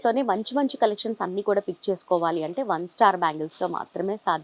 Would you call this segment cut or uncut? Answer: uncut